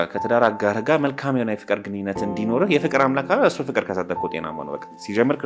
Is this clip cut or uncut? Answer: uncut